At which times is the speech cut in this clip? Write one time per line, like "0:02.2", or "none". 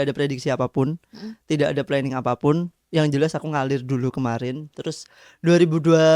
none

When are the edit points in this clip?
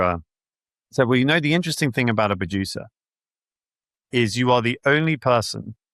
none

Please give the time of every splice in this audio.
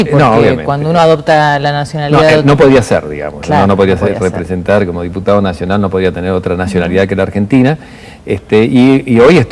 0:06.4

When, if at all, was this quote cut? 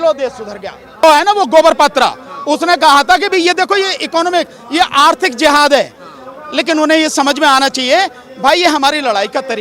0:01.0

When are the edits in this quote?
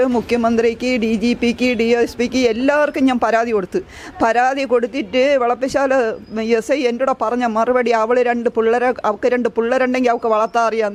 none

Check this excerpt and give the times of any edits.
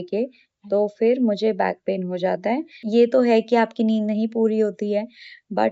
0:02.8

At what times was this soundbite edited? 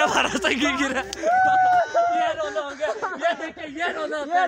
none

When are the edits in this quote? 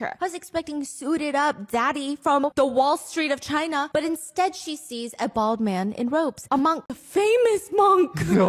0:02.4
0:07.0

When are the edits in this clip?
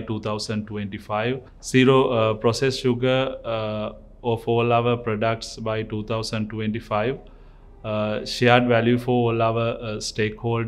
none

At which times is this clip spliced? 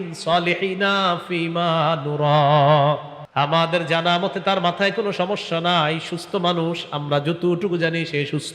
0:03.2

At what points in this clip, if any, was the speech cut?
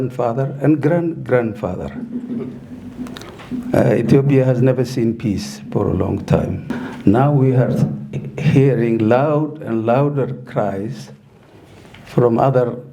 0:06.7

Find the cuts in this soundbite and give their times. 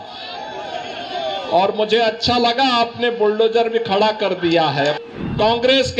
0:05.0

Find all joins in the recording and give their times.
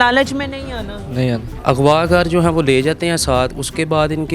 0:01.5

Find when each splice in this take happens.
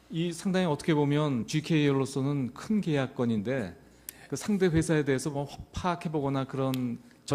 none

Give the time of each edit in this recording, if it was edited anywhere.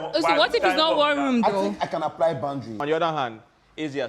0:02.8

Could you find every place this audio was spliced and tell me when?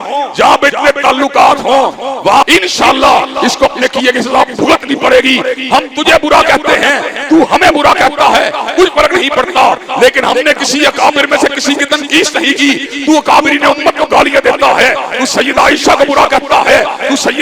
0:02.4

